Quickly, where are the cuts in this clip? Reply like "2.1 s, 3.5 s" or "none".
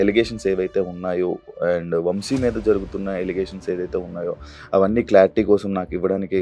none